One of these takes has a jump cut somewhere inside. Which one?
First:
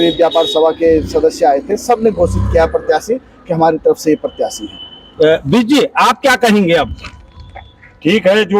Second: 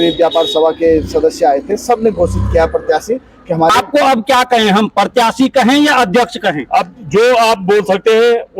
second; 1 cut; at 3.7 s

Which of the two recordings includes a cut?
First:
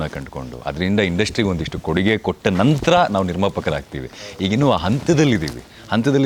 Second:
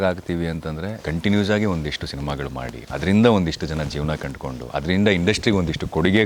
second; 2 cuts; at 0.9 s, 2.8 s

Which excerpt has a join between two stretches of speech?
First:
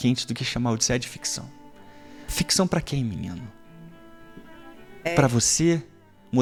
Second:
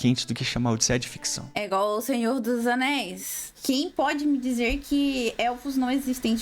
second; 2 cuts; at 1.6 s, 3.5 s

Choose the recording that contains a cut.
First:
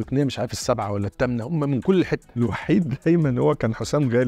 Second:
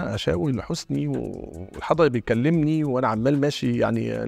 first; 1 cut; at 2.3 s

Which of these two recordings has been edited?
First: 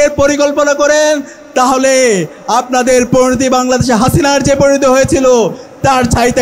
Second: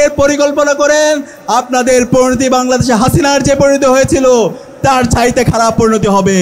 second; 1 cut; at 1.4 s

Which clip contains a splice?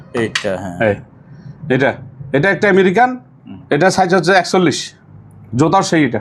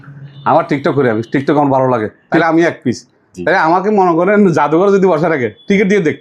second; 1 cut; at 2.4 s

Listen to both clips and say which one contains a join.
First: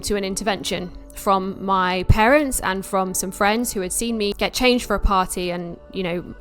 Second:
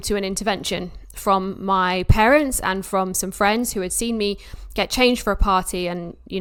first; 1 cut; at 4.3 s

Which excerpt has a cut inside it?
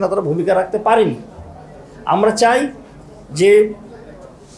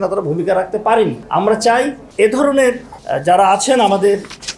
second; 3 cuts; at 1.2 s, 2.0 s, 2.9 s

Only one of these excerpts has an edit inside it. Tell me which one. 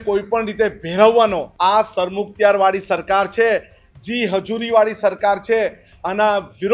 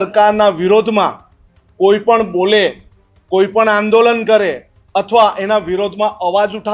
first; 1 cut; at 1.5 s

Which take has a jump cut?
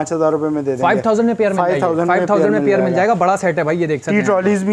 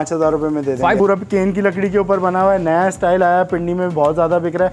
second; 1 cut; at 1.0 s

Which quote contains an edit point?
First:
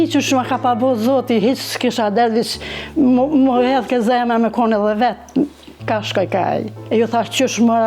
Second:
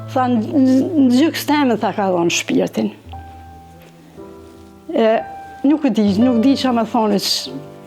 first; 1 cut; at 6.8 s

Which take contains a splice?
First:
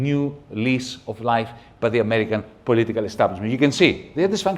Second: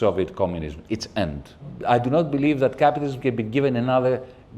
second; 1 cut; at 1.7 s

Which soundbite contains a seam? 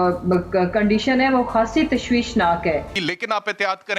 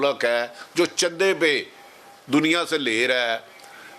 first; 1 cut; at 2.9 s

